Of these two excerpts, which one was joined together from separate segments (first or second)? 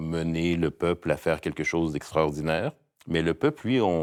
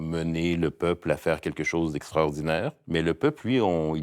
second